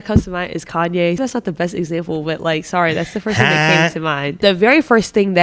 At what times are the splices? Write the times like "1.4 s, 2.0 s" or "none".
1.2 s, 4.3 s